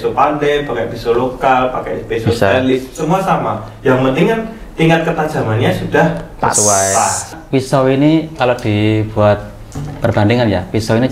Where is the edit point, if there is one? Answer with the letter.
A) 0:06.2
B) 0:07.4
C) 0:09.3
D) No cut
B